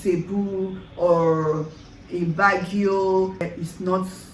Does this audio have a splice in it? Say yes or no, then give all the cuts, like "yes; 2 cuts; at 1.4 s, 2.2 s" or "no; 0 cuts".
yes; 1 cut; at 3.4 s